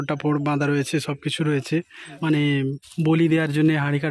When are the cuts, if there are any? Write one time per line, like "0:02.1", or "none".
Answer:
0:02.1